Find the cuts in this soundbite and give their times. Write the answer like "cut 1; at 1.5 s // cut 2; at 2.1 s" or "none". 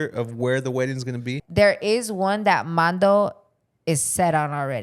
cut 1; at 1.3 s